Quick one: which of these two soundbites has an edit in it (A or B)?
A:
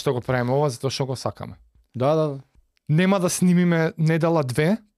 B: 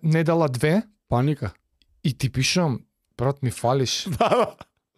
A